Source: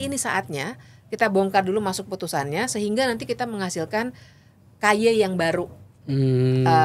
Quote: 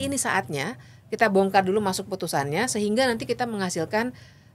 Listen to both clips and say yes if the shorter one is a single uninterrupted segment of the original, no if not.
yes